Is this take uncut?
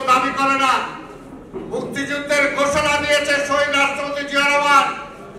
yes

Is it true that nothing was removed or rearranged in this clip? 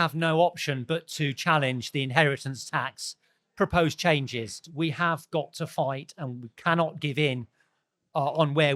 no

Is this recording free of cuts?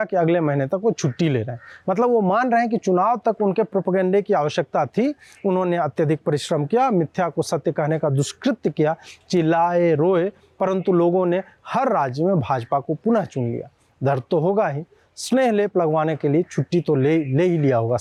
yes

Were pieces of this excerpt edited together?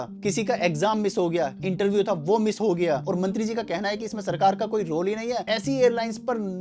yes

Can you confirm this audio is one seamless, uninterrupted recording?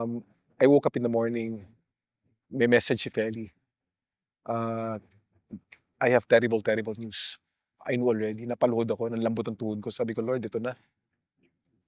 yes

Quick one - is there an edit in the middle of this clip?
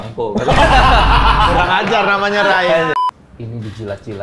yes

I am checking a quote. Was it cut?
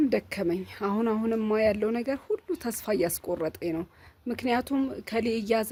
no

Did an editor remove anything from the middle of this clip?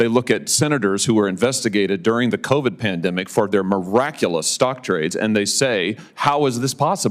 no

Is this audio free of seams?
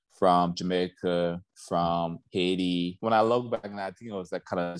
no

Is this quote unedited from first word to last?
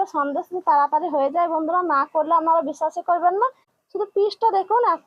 no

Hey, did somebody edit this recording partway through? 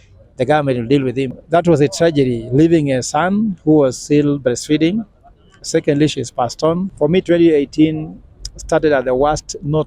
yes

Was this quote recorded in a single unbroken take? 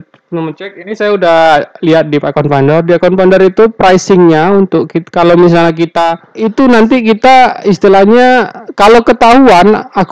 no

